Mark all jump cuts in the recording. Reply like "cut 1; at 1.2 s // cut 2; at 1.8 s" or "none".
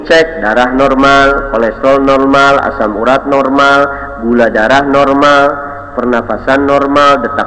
none